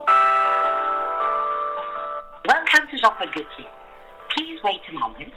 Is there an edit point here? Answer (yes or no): no